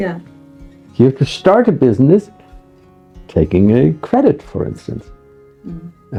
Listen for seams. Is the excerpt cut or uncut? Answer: uncut